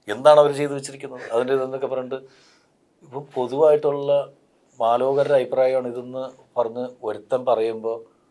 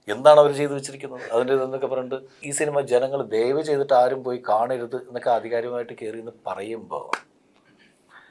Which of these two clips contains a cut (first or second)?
second